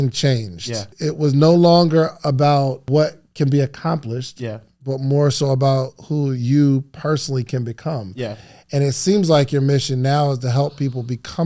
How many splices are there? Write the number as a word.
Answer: two